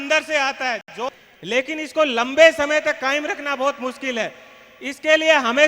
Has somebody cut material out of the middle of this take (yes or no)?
yes